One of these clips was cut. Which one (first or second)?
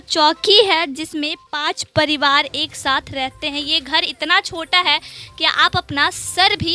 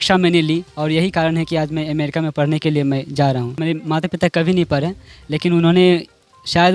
second